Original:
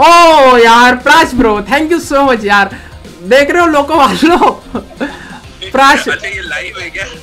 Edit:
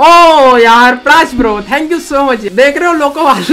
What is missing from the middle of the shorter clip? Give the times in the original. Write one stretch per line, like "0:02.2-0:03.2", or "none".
0:02.4-0:03.2